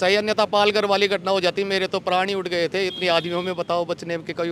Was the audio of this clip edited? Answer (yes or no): no